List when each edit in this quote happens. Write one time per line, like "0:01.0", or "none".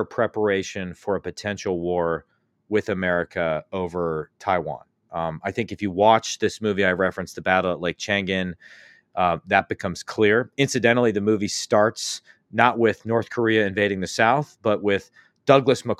none